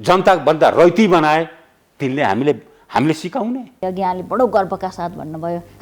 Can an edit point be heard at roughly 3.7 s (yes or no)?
yes